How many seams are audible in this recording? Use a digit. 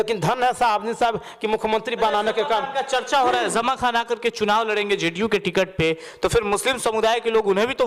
0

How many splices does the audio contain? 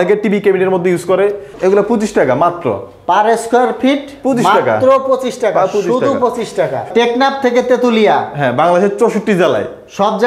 2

